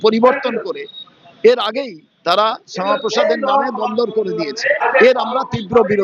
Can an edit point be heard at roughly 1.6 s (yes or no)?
no